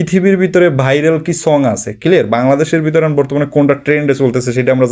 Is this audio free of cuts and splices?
yes; 0 cuts

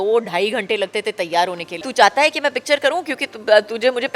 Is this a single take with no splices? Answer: no; 1 cut; at 1.9 s

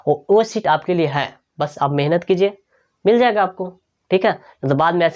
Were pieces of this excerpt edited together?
no; 0 cuts

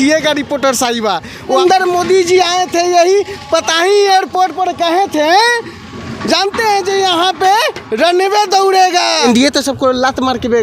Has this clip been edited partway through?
yes; 2 cuts; at 1.6 s, 9.2 s

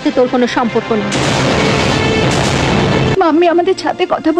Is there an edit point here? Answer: yes; 1 cut; at 3.1 s

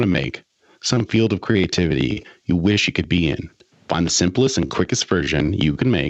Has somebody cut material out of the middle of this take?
no; 0 cuts

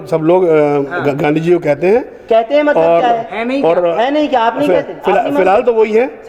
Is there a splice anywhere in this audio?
no; 0 cuts

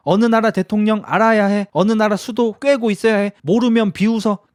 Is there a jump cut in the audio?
no; 0 cuts

